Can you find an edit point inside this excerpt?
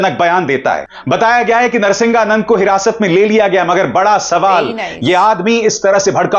yes; 1 cut; at 0.9 s

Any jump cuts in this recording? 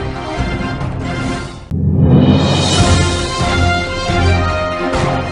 no; 0 cuts

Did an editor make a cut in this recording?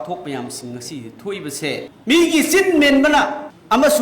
yes; 1 cut; at 1.9 s

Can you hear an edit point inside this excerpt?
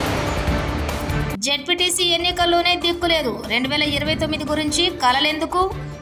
yes; 1 cut; at 1.1 s

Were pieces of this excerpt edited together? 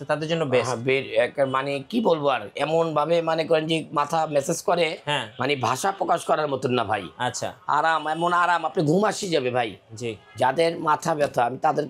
no; 0 cuts

